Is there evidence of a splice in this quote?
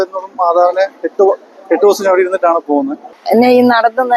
yes; 1 cut; at 3.0 s

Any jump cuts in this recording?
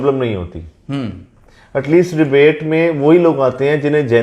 no; 0 cuts

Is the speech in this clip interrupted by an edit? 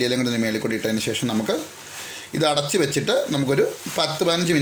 no; 0 cuts

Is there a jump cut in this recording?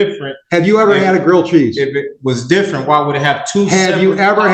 no; 0 cuts

